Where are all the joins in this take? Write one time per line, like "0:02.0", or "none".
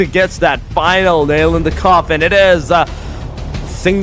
none